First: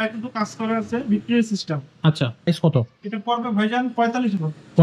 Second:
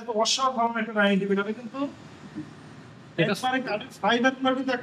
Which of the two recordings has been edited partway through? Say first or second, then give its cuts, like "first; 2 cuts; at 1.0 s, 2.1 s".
first; 1 cut; at 2.5 s